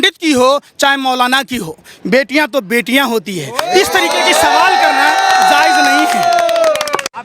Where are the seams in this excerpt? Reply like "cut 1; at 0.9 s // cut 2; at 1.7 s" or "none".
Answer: none